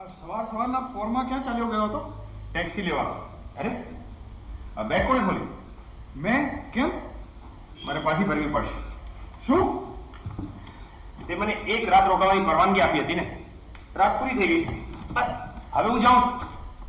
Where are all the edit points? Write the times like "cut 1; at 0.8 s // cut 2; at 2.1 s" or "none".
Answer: none